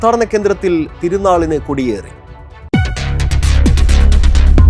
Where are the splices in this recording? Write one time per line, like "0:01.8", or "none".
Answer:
none